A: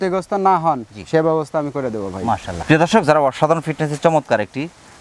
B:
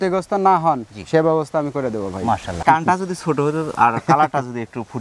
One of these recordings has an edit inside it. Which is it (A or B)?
B